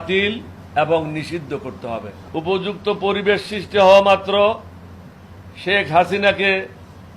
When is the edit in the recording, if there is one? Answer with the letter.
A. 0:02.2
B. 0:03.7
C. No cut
A